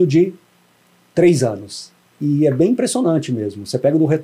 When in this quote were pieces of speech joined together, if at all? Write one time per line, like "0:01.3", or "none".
0:02.2